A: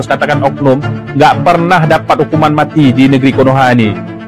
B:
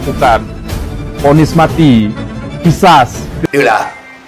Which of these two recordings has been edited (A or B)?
B